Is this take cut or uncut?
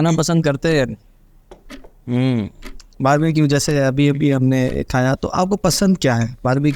uncut